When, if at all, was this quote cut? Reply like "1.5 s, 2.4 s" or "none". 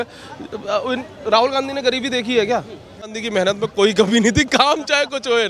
3.2 s